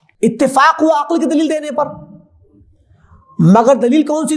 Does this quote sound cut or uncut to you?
uncut